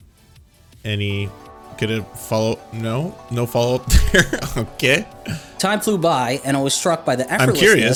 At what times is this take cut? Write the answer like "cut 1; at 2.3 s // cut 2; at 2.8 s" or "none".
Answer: none